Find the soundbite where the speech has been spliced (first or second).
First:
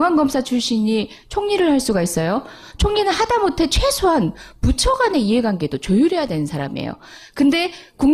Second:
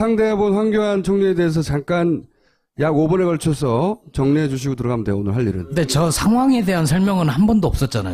second